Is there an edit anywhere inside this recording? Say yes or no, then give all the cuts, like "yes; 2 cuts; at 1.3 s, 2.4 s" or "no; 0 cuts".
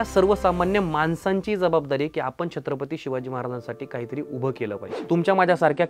yes; 1 cut; at 4.9 s